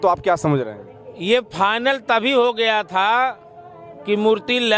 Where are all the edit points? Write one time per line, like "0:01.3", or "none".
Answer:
none